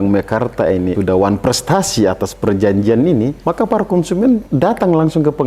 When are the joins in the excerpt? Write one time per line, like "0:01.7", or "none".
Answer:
0:00.9
0:03.4
0:04.5